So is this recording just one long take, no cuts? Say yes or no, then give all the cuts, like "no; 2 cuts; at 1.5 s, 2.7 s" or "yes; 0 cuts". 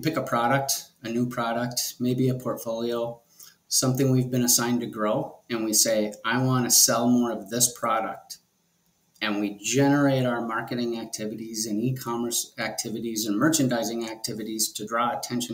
yes; 0 cuts